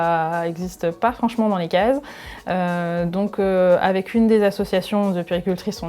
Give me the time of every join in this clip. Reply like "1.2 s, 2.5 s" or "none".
none